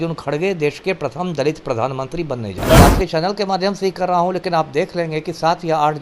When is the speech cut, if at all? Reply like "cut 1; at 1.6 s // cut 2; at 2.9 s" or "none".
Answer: cut 1; at 2.8 s